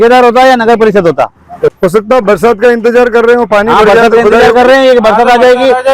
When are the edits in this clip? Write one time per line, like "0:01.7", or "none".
0:01.8